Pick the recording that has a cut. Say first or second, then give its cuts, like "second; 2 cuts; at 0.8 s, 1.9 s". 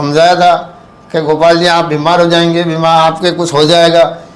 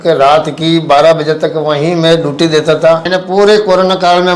second; 1 cut; at 3.1 s